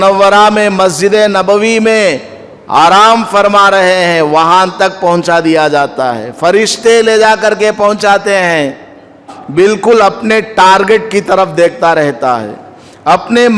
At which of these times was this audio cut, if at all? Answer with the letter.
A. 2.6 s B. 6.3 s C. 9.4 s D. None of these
C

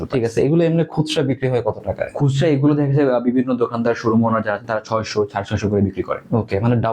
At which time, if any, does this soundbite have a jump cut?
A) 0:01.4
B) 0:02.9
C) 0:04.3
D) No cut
D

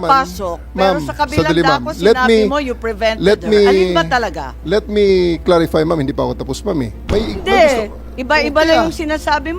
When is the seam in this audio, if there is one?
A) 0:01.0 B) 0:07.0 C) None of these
B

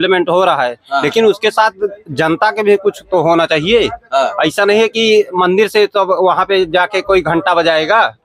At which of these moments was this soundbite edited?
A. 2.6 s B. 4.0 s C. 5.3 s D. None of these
D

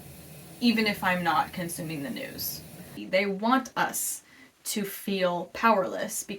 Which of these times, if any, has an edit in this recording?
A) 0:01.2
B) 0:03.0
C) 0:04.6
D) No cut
B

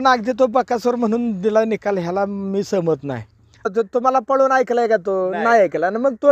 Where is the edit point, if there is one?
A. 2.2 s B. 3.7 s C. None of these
B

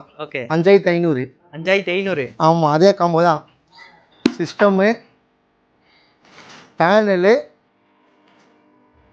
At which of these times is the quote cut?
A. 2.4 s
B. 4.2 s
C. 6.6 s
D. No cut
D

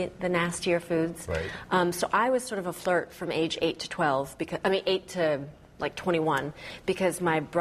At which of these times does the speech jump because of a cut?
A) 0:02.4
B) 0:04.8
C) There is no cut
C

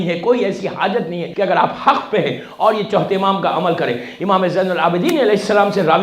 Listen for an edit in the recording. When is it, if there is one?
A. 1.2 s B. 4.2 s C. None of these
A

